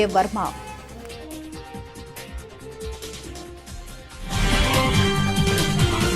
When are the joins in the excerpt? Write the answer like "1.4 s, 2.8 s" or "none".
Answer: 2.1 s, 4.9 s